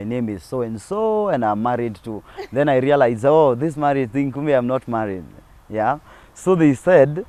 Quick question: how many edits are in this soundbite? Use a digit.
0